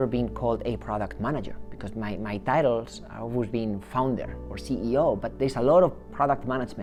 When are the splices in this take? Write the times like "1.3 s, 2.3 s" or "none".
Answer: none